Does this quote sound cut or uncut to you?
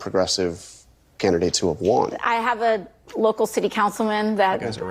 cut